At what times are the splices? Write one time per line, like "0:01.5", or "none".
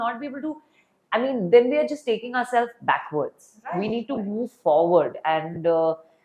none

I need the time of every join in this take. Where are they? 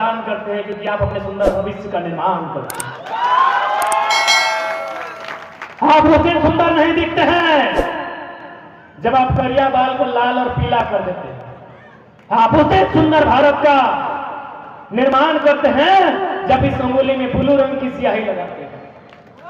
none

